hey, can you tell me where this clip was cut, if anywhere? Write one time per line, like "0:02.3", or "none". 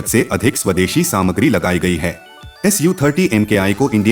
0:02.2